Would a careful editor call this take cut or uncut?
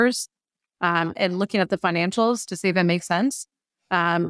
uncut